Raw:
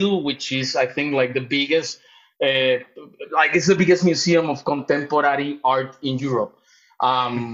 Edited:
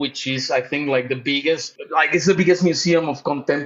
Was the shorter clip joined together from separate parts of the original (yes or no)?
yes